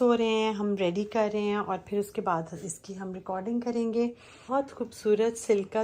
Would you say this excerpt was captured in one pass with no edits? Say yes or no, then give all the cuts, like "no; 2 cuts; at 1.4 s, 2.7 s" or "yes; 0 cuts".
no; 1 cut; at 4.4 s